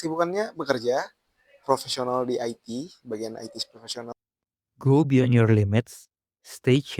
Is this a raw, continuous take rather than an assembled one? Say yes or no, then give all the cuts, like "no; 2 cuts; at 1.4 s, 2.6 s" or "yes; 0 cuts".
no; 1 cut; at 4.1 s